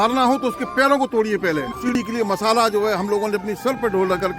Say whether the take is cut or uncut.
cut